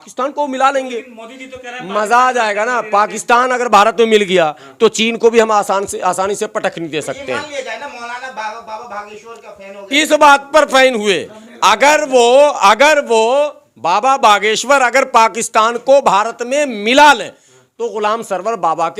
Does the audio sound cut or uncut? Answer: uncut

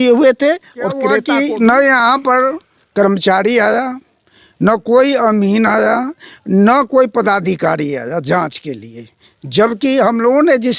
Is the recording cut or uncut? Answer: cut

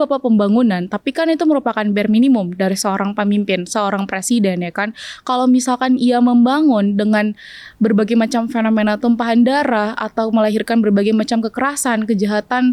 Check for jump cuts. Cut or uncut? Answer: uncut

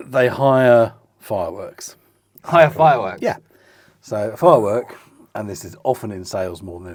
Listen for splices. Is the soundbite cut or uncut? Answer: uncut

